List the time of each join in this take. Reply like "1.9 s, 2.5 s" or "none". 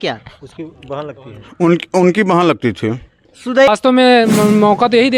3.7 s